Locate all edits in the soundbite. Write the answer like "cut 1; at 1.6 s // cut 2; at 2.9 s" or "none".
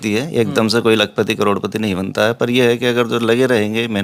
none